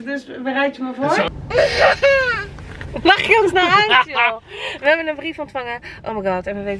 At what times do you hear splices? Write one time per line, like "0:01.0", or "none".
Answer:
0:01.3